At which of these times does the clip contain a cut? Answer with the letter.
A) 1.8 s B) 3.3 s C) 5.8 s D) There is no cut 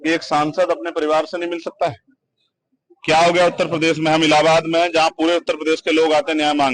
D